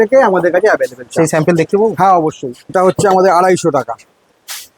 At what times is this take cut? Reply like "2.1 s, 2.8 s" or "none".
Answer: 2.7 s